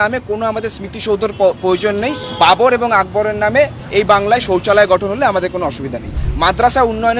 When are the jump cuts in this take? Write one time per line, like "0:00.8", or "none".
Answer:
0:02.2
0:03.8
0:06.2